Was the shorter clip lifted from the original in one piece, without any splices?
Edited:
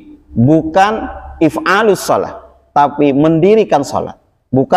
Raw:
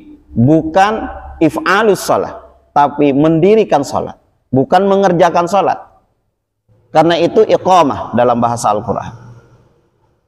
yes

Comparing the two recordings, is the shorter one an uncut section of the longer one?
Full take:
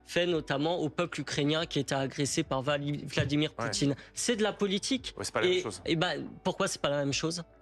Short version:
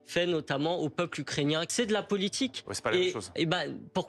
no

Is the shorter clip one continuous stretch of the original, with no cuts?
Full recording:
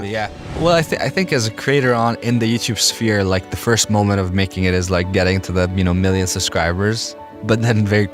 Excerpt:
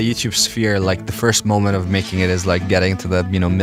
yes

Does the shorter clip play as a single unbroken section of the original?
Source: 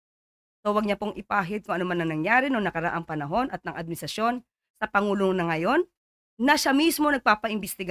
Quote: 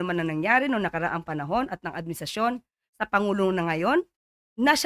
yes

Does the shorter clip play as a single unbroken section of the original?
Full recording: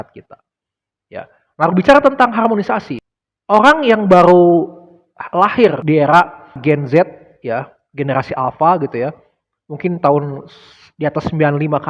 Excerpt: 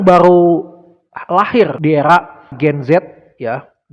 yes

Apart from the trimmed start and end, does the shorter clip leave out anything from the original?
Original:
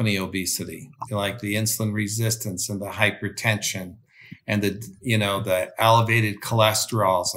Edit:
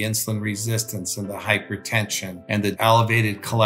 yes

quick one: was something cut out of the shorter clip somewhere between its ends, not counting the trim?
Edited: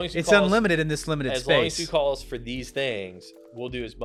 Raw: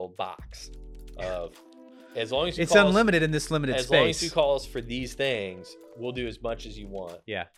no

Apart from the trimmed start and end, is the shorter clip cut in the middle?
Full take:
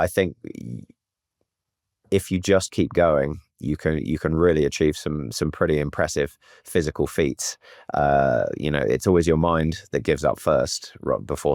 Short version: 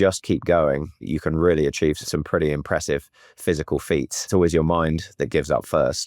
yes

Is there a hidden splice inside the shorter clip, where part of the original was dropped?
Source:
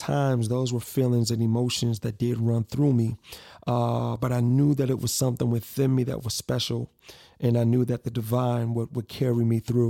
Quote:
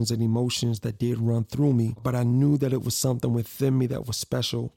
yes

